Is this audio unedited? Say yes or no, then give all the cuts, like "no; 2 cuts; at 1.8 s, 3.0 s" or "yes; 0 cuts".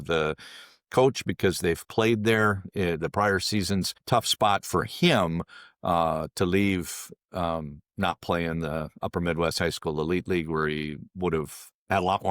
no; 1 cut; at 4.0 s